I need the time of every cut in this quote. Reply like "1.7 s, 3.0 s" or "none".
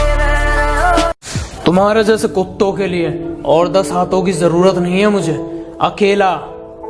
1.0 s